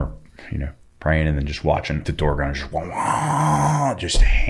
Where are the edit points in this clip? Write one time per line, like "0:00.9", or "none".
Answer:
0:02.0